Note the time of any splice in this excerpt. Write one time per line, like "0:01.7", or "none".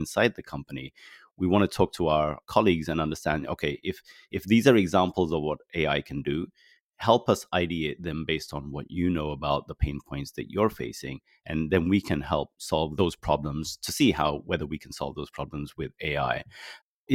none